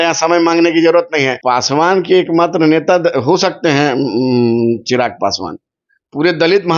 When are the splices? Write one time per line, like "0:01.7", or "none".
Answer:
0:01.4